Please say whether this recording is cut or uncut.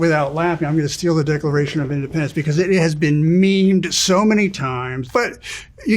cut